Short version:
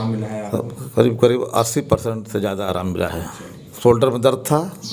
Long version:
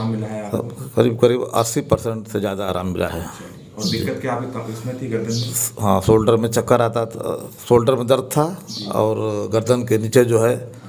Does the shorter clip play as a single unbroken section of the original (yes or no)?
no